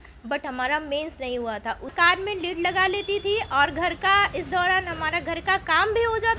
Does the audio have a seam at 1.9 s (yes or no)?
yes